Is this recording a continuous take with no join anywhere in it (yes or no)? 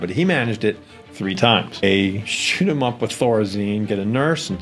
no